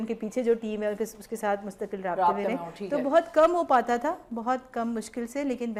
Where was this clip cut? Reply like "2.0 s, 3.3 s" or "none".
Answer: none